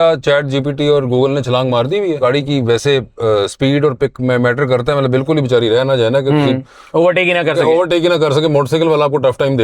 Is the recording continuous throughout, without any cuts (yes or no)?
no